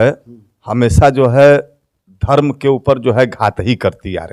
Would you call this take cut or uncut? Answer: uncut